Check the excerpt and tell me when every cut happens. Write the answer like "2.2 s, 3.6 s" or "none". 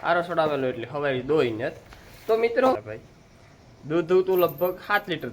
2.8 s